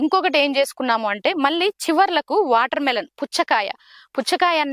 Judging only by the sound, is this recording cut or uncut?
uncut